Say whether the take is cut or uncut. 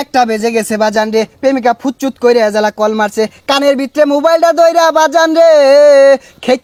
uncut